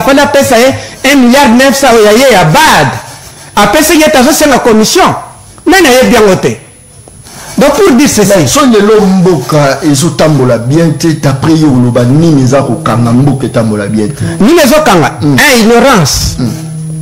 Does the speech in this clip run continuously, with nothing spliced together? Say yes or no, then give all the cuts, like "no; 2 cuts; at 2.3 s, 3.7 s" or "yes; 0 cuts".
yes; 0 cuts